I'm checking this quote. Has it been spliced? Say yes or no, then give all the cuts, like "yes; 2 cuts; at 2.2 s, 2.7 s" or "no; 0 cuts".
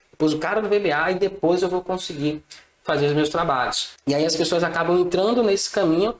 yes; 1 cut; at 3.9 s